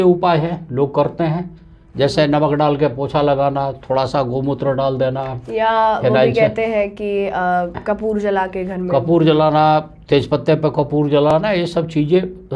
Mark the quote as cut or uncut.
uncut